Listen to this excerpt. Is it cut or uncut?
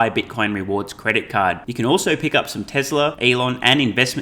cut